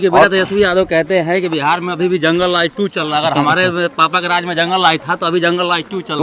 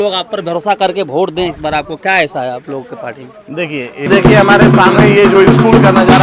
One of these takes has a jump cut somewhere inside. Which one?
second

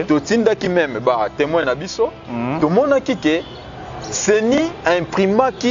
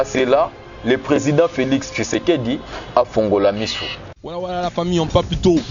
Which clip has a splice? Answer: second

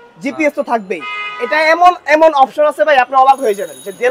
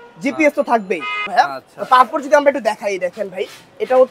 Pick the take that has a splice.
second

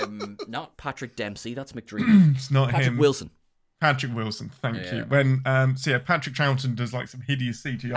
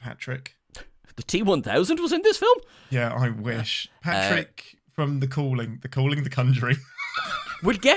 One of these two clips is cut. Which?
second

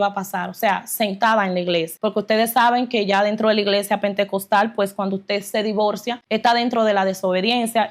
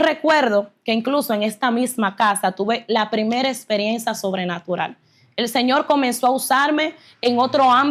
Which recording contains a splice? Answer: first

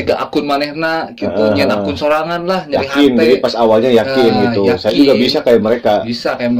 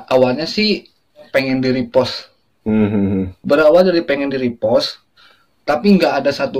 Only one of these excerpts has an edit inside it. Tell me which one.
second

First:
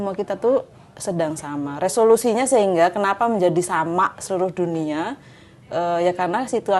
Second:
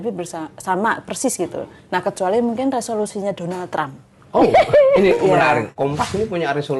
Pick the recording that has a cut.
second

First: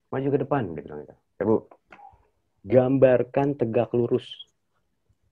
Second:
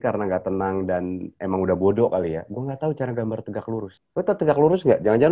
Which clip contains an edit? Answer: second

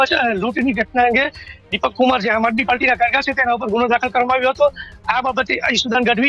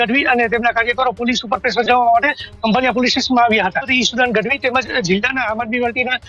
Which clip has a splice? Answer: second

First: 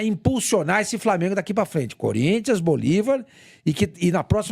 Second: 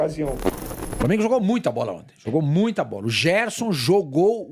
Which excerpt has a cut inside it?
second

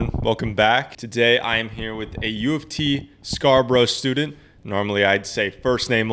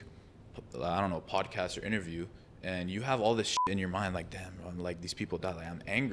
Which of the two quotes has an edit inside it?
first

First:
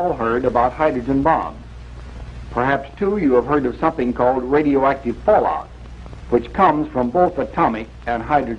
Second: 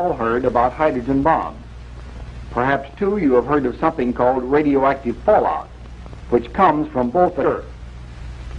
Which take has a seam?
first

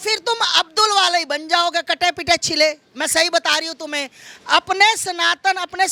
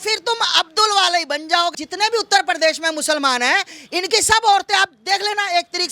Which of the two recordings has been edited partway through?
second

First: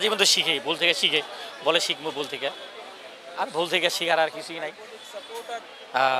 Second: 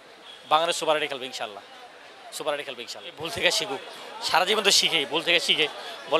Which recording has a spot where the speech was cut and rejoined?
second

